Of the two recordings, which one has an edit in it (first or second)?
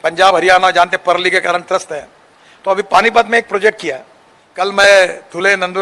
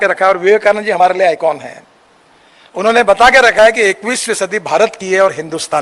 first